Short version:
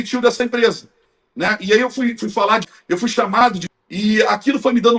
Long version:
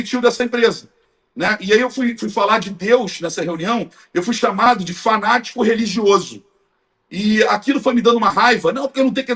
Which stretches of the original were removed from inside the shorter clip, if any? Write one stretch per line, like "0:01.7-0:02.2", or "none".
0:02.7-0:04.0
0:04.9-0:06.9